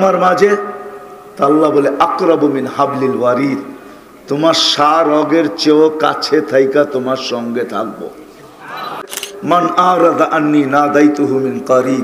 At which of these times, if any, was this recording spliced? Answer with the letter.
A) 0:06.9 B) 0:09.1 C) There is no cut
B